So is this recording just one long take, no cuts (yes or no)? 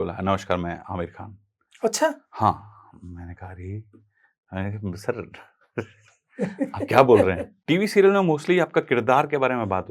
no